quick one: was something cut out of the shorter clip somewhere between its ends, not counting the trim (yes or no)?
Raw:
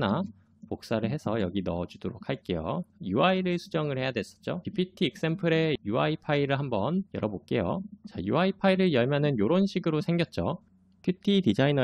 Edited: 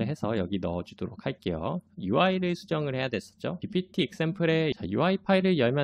yes